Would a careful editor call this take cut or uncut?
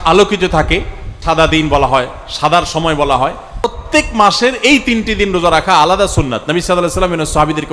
cut